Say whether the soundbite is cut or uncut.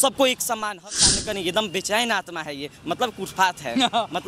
cut